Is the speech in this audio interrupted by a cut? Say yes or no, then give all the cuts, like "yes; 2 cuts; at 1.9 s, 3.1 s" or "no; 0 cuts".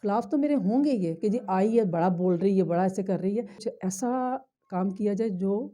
yes; 1 cut; at 3.6 s